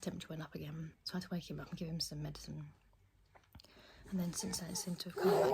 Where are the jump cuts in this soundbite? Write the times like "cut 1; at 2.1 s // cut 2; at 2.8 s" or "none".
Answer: cut 1; at 1.0 s